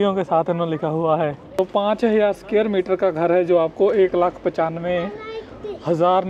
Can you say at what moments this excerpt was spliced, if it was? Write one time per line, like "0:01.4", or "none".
0:01.6